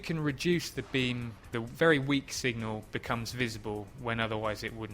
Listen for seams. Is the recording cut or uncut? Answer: cut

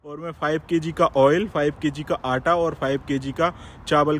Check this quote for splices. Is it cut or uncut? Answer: uncut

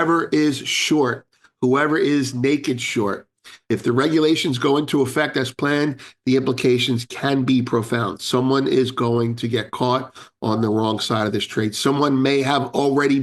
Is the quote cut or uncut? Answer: uncut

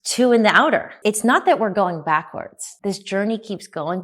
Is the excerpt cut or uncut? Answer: cut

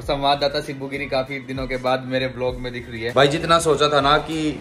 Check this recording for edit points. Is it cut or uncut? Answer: cut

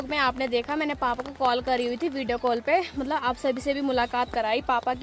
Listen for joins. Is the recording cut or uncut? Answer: uncut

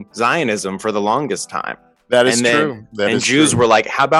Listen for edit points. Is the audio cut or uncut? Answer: uncut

